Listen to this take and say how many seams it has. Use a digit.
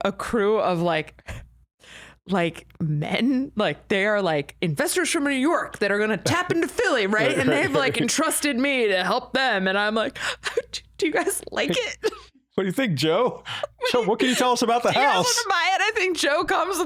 0